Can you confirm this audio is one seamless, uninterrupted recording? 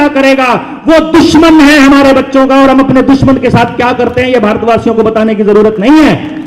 yes; 0 cuts

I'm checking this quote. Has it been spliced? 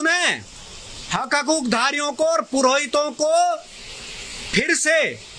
no; 0 cuts

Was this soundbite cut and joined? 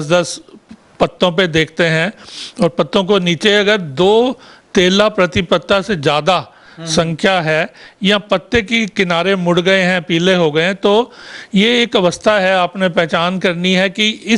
no; 0 cuts

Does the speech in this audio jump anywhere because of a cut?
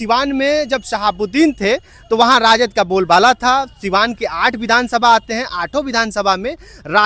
no; 0 cuts

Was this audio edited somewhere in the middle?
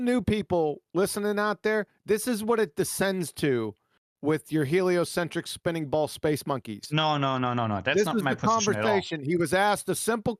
no; 0 cuts

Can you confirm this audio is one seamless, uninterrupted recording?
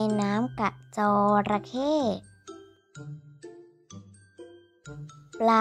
yes; 0 cuts

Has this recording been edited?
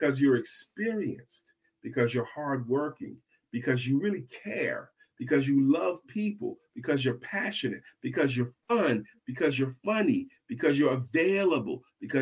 no; 0 cuts

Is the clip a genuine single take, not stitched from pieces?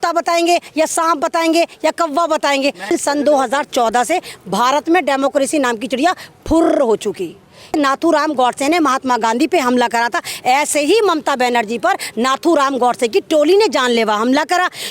no; 2 cuts; at 2.9 s, 7.7 s

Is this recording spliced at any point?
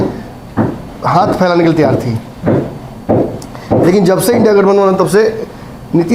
no; 0 cuts

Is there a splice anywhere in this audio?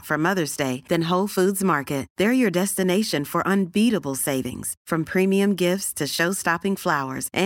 no; 0 cuts

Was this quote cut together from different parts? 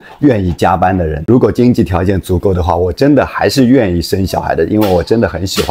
yes; 1 cut; at 1.1 s

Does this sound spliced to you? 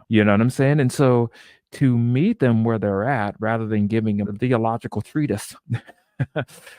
yes; 1 cut; at 4.3 s

